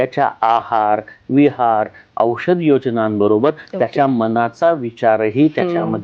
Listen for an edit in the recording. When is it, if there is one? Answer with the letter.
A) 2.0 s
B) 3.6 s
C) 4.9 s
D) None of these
D